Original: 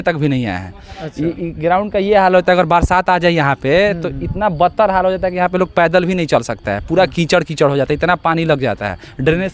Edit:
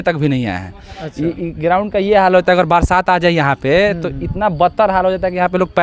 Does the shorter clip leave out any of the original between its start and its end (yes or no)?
no